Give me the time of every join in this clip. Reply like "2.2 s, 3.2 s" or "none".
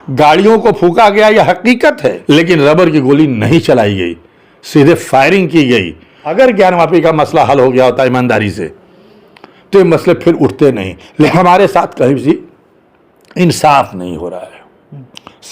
2.2 s, 6.2 s, 11.3 s